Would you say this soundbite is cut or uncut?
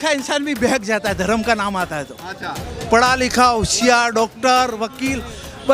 uncut